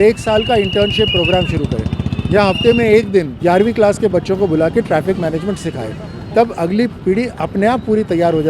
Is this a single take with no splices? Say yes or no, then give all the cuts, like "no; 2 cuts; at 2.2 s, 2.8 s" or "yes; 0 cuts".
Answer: no; 1 cut; at 3.3 s